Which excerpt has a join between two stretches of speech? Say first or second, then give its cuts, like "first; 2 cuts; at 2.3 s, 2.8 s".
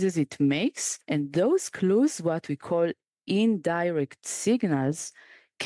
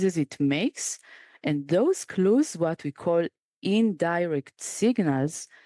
first; 1 cut; at 0.9 s